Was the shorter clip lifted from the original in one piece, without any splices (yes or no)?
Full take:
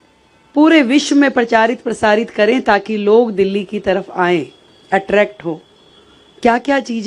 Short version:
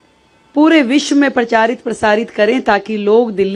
yes